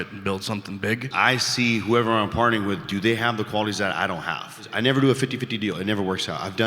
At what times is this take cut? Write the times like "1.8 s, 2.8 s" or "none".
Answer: 1.1 s, 4.7 s

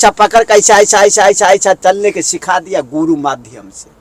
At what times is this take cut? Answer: none

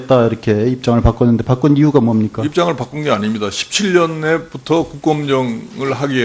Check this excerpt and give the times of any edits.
none

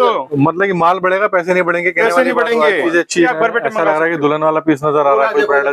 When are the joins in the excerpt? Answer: 3.3 s

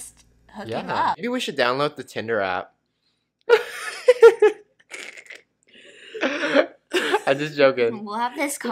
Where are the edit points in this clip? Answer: 1.2 s

